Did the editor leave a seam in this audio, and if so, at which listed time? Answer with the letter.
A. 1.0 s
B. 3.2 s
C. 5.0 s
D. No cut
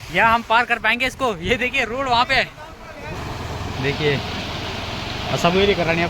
B